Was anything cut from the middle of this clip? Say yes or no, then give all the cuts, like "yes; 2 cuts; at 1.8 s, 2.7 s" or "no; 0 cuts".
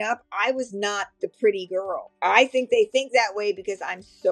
yes; 1 cut; at 2.1 s